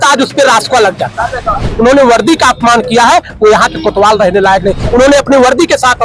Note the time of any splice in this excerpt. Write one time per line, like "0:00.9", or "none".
0:01.6
0:04.8